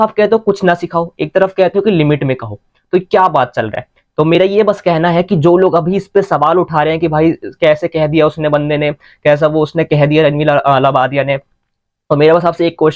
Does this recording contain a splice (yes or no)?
no